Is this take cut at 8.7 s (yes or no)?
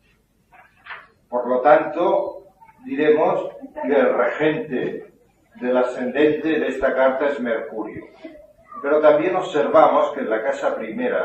no